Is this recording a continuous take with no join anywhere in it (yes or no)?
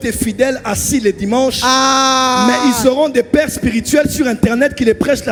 yes